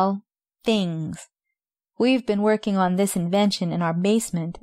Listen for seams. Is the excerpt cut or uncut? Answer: uncut